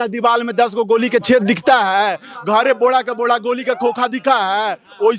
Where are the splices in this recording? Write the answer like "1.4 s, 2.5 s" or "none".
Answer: none